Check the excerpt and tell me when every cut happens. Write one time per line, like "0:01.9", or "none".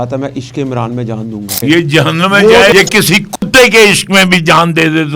0:01.6
0:02.7